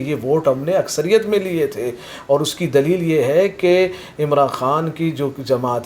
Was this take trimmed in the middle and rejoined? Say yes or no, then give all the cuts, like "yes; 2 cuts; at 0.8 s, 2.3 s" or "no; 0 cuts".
no; 0 cuts